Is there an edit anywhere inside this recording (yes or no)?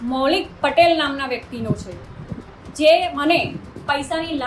no